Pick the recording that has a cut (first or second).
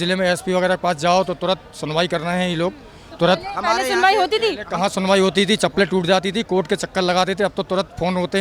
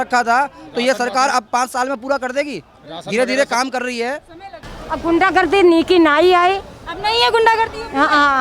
second